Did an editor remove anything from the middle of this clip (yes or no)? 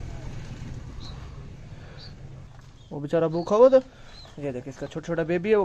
yes